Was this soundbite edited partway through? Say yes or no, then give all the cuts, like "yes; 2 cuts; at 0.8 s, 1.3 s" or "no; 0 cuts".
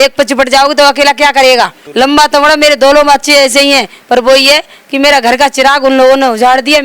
yes; 1 cut; at 1.8 s